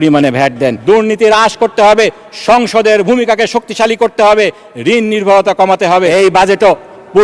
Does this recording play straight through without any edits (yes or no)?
no